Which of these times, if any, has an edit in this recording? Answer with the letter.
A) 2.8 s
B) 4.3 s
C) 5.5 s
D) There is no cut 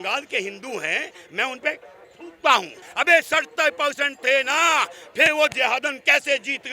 A